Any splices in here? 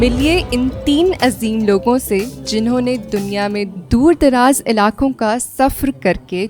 no; 0 cuts

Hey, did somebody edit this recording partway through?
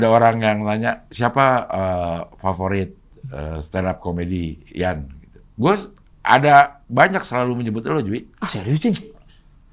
no; 0 cuts

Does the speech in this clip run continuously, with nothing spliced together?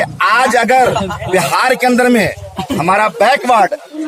yes; 0 cuts

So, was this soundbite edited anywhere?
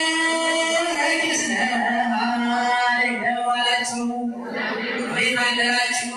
no; 0 cuts

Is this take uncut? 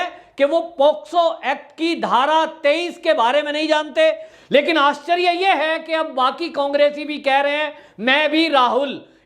no; 1 cut; at 4.3 s

